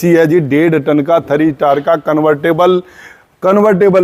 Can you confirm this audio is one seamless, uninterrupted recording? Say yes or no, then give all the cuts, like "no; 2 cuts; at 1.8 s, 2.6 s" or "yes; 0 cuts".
yes; 0 cuts